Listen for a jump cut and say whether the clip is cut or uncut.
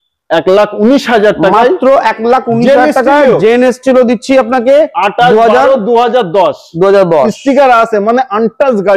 uncut